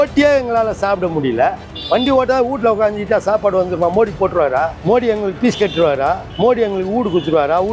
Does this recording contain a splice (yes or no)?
yes